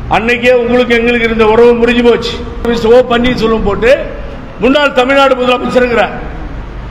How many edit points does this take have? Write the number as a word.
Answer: one